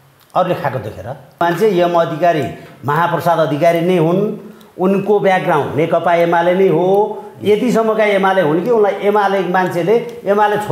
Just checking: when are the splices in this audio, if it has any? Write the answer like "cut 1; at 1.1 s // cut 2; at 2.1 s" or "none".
cut 1; at 1.4 s